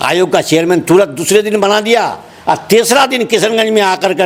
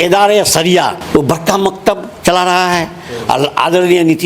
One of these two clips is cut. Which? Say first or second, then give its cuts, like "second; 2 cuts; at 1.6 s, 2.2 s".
second; 1 cut; at 1.0 s